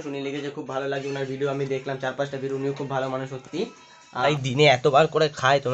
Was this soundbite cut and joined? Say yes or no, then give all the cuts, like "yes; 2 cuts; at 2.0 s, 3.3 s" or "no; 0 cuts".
yes; 1 cut; at 4.2 s